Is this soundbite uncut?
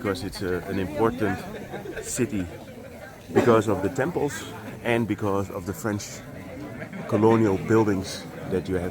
yes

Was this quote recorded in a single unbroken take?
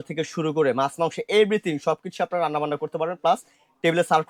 yes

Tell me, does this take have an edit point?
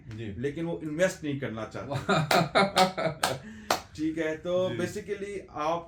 no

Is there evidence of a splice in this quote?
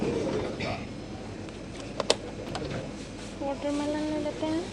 no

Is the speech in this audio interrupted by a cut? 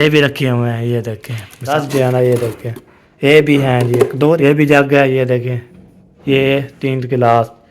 yes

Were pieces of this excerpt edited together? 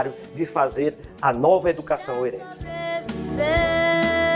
no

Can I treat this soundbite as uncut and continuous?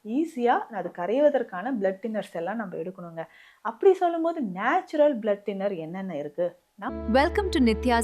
no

